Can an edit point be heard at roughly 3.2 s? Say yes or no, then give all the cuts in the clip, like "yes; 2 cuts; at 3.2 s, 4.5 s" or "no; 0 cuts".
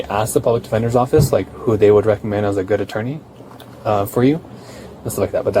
no; 0 cuts